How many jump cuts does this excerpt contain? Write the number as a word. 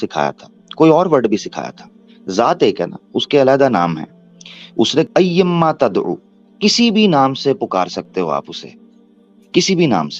one